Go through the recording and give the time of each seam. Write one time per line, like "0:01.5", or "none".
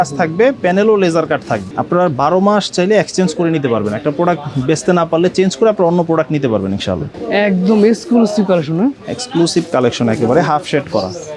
0:01.7
0:07.1